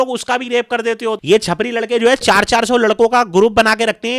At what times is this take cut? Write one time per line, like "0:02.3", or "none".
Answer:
0:01.2

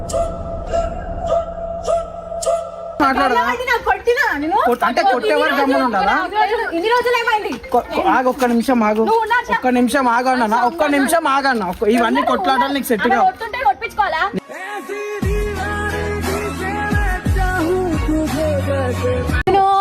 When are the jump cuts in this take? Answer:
none

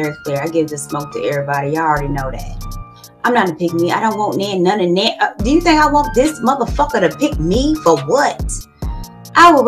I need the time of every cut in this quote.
none

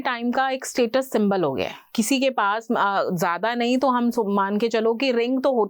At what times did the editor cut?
0:01.8

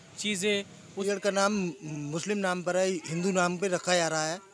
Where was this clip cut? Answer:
0:01.0

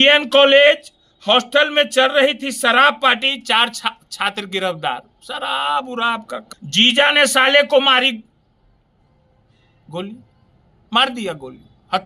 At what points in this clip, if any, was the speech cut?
0:06.4

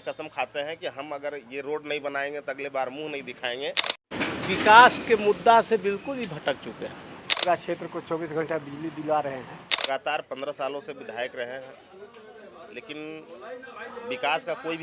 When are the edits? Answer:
0:04.1
0:07.4
0:09.8

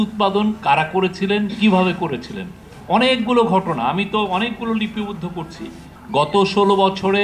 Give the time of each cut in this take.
0:05.9

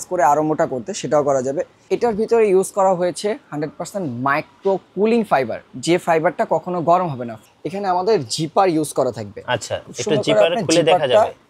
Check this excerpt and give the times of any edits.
0:01.8
0:07.3

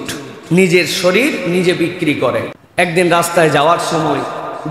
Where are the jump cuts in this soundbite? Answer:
0:02.6

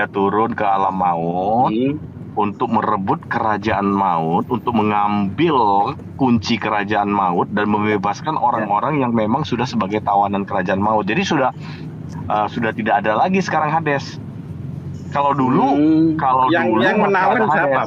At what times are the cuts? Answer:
none

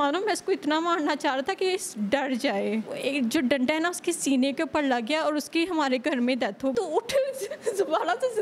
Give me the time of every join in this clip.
0:02.9
0:06.7

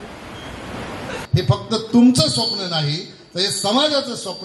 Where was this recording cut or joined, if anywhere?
0:01.2

